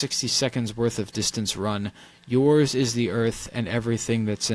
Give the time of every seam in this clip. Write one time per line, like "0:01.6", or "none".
none